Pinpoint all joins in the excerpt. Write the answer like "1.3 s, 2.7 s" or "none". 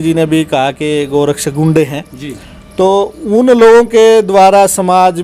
none